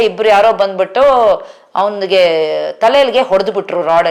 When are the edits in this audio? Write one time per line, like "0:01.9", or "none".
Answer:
none